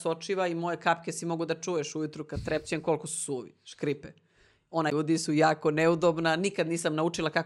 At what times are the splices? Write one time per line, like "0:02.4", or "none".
0:04.9